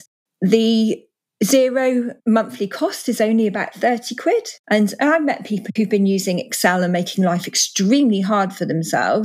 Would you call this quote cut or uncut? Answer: cut